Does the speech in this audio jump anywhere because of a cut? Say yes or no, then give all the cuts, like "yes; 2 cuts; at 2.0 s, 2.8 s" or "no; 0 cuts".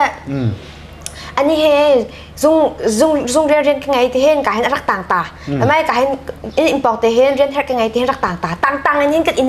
no; 0 cuts